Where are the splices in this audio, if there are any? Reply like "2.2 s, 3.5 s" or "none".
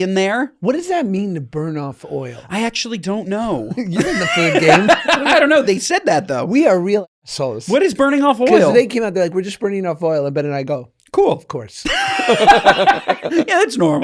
none